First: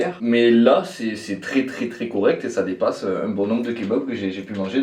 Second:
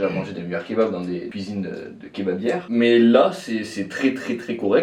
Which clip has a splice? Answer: second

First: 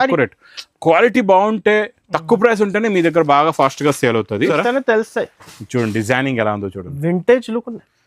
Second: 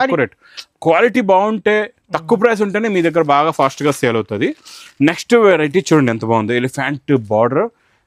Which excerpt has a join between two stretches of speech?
first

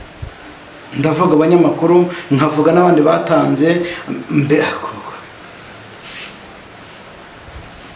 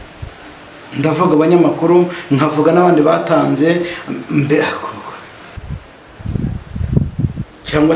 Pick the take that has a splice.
second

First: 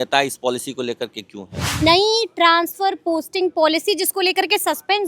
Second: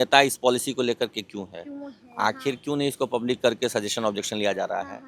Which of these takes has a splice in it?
first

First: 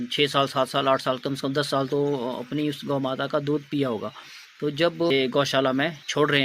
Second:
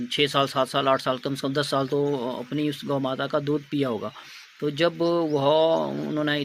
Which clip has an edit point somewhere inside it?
first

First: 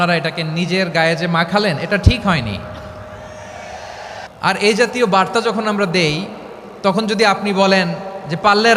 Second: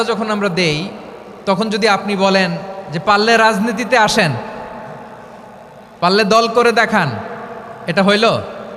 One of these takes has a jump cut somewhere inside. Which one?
first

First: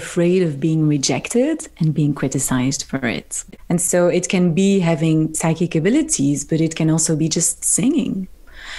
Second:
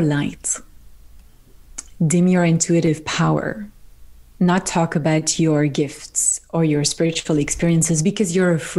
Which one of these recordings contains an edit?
first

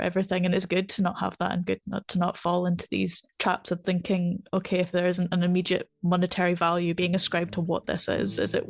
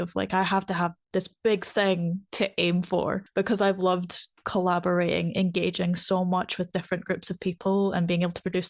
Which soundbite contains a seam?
second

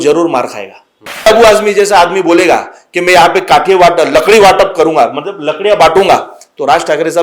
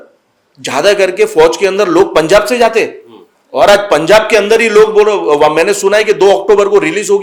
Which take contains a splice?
first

